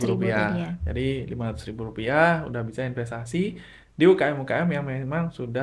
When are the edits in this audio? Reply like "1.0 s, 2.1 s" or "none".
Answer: none